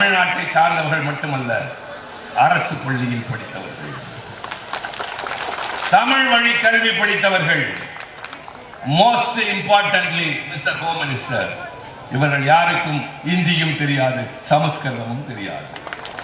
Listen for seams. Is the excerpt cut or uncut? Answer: uncut